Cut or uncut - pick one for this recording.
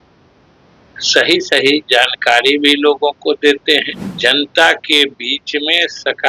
cut